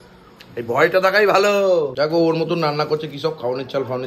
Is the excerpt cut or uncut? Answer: cut